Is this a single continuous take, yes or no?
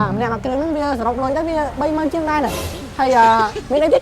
no